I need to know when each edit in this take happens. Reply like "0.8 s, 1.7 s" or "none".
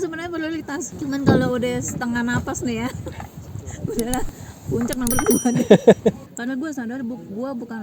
0.9 s, 6.3 s

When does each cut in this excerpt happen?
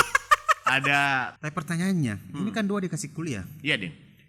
1.3 s

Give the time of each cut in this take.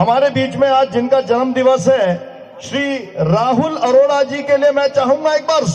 none

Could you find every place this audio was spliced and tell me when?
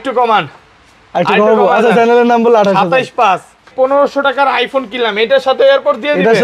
3.7 s

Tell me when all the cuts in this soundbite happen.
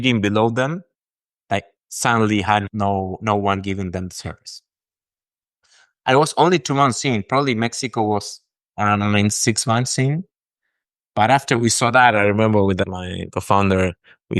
12.8 s

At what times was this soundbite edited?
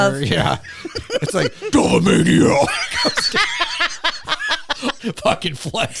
1.7 s, 5.0 s

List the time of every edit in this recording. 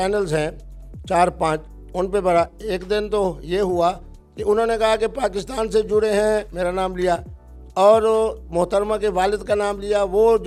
none

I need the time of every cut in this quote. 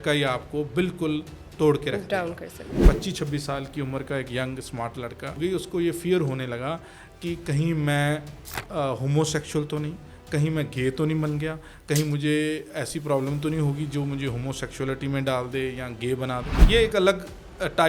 2.8 s, 5.4 s, 16.5 s

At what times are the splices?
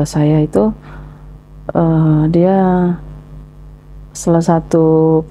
none

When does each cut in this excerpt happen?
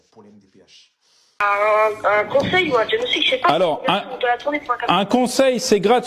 1.4 s

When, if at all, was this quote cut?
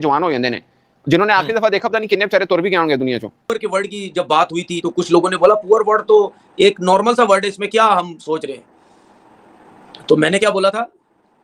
3.5 s

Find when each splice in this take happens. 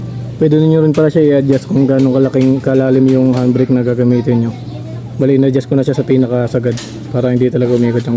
none

